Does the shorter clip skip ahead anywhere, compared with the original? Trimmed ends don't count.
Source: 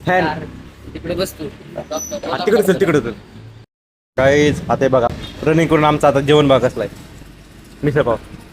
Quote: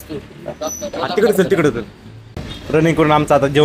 yes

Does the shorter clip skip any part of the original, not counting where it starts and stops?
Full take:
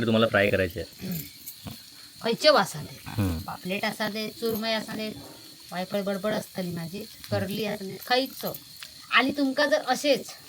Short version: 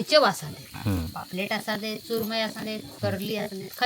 yes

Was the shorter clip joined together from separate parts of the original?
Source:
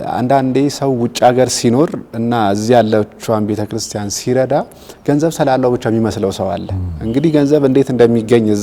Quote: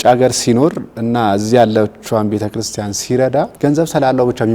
yes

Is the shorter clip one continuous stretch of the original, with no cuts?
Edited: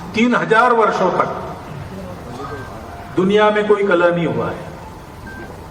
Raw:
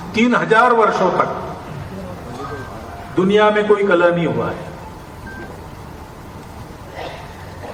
yes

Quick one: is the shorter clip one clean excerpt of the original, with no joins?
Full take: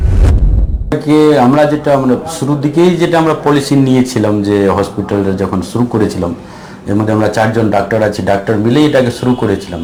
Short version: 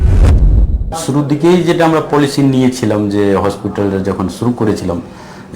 no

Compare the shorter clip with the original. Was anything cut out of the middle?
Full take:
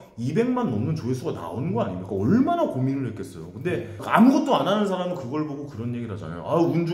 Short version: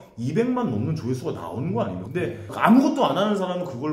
yes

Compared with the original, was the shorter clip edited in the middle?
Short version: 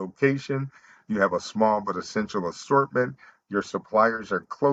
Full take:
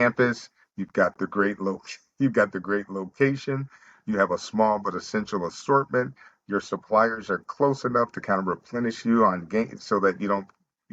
no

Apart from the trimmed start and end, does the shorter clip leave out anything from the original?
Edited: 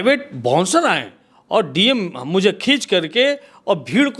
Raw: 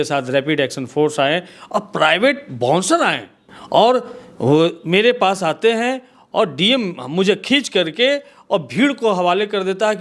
yes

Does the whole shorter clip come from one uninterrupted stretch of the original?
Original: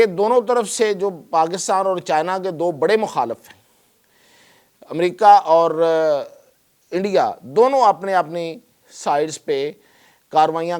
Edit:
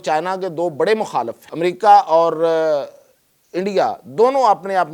no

